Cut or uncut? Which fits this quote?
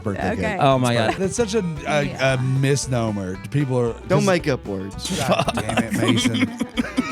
cut